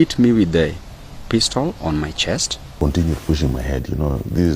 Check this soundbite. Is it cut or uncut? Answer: cut